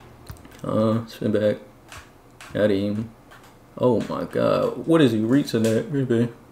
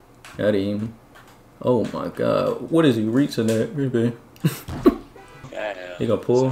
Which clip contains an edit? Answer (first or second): second